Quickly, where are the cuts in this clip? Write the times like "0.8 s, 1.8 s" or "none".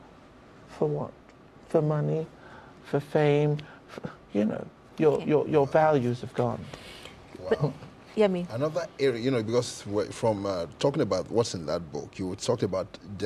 11.5 s